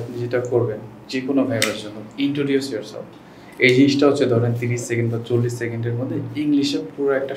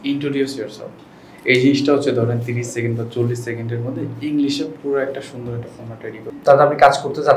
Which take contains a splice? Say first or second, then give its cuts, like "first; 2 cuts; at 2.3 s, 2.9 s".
second; 1 cut; at 6.3 s